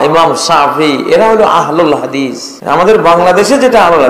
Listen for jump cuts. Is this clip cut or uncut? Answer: cut